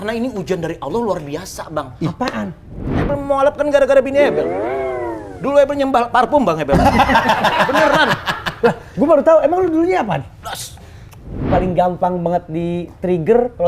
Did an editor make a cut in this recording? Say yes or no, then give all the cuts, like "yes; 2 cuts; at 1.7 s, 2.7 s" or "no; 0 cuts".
yes; 2 cuts; at 2.9 s, 11.4 s